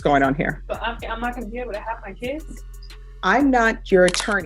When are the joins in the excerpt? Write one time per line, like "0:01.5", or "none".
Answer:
none